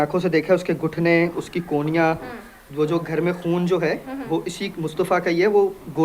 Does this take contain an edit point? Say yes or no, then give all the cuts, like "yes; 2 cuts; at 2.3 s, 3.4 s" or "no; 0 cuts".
no; 0 cuts